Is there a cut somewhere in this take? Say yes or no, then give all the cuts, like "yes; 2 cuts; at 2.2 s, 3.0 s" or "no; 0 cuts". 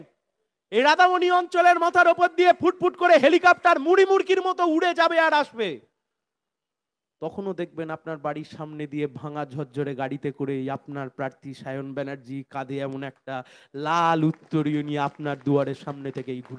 no; 0 cuts